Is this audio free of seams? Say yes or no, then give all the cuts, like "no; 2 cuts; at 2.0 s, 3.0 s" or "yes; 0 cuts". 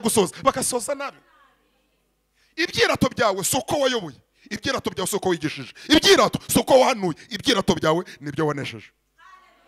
yes; 0 cuts